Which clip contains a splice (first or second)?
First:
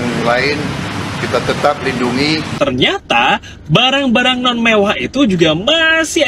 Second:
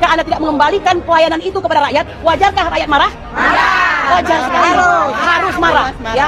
first